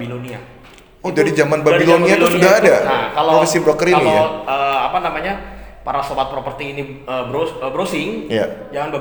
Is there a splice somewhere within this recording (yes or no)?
no